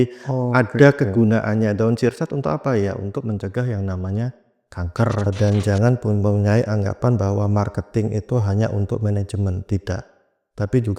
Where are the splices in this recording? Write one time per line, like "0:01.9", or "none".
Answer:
0:05.2

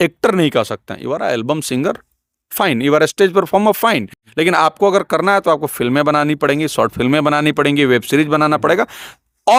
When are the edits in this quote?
none

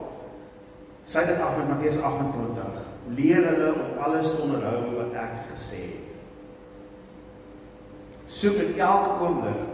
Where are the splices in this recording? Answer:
0:06.8

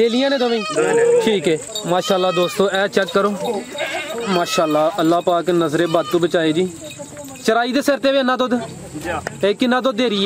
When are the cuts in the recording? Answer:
0:01.7

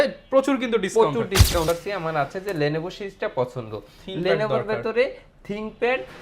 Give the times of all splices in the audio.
0:01.7

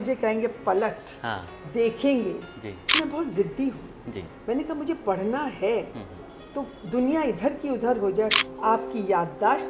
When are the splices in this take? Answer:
0:02.9
0:08.4

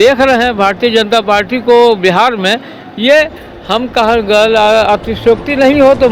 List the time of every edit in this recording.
none

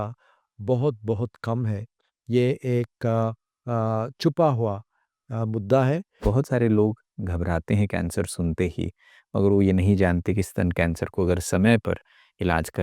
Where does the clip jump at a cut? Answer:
0:06.2

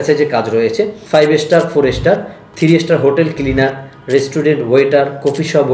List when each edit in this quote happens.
0:01.0

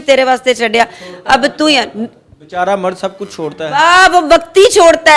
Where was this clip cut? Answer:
none

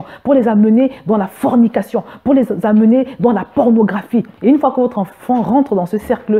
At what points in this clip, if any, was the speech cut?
0:04.3

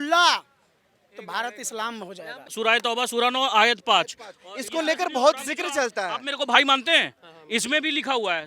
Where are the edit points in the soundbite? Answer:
0:02.5

